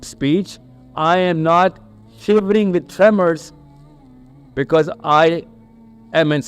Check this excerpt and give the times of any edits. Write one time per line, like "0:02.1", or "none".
none